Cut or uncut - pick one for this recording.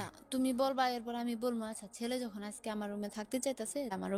uncut